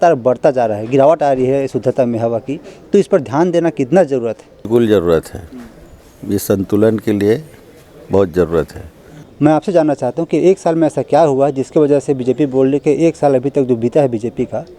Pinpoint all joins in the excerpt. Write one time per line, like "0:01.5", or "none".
0:04.5
0:09.2